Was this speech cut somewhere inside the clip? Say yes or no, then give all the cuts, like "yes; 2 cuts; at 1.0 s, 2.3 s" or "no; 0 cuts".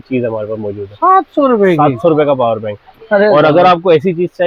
no; 0 cuts